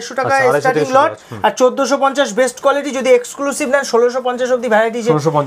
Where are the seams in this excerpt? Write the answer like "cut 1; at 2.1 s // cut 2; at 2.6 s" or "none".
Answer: none

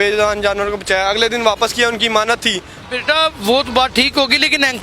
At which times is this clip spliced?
cut 1; at 2.7 s

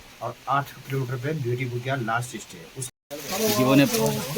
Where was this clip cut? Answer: cut 1; at 2.8 s

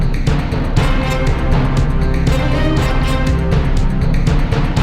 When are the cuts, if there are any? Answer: none

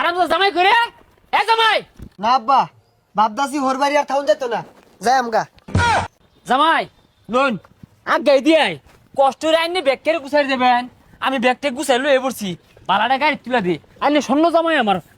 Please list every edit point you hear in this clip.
none

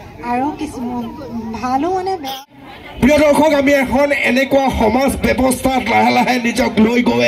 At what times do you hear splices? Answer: cut 1; at 2.3 s

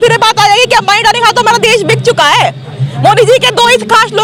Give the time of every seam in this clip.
none

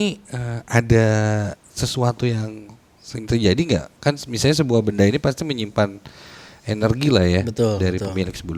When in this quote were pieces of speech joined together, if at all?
none

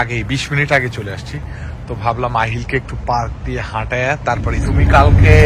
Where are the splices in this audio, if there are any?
cut 1; at 4.5 s

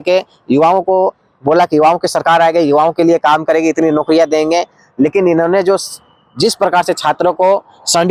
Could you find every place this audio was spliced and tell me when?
none

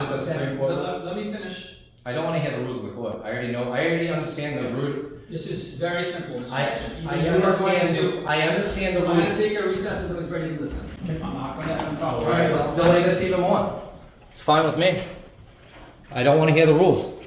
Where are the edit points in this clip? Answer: none

